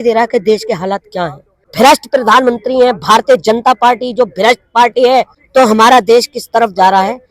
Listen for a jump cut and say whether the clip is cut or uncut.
cut